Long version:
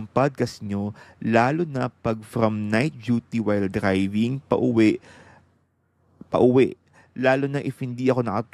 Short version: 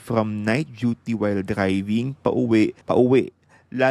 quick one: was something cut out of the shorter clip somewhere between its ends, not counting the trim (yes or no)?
yes